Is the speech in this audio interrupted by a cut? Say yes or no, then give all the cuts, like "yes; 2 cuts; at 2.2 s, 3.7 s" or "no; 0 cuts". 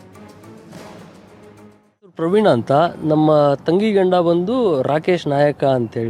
yes; 1 cut; at 2.2 s